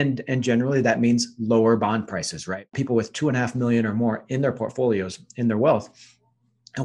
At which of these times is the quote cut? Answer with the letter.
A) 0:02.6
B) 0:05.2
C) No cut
A